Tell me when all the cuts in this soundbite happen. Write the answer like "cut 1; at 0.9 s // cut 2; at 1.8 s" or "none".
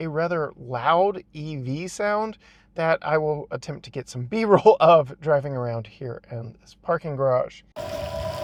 none